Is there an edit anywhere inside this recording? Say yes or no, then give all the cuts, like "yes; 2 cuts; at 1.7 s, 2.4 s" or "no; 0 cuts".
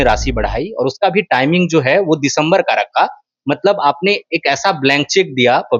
no; 0 cuts